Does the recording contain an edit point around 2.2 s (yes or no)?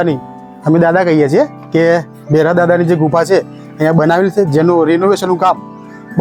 no